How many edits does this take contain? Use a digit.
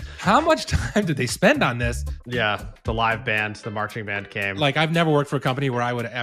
2